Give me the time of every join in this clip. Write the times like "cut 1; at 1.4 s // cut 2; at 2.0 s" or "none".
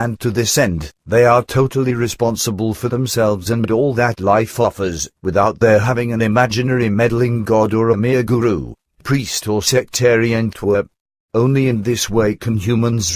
cut 1; at 1.5 s